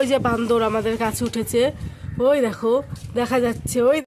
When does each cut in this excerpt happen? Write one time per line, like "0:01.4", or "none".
none